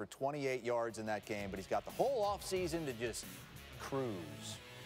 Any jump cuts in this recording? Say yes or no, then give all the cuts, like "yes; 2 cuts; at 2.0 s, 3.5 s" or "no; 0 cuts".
no; 0 cuts